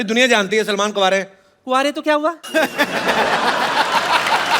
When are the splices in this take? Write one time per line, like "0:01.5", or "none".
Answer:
none